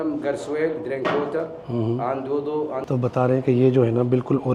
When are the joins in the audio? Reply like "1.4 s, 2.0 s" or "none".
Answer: none